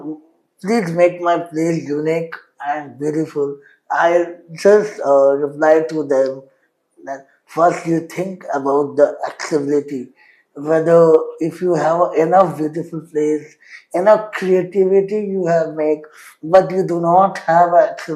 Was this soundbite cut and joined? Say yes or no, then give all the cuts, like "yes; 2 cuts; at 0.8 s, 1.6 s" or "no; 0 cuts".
no; 0 cuts